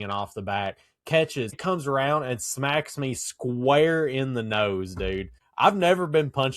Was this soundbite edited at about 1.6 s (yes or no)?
yes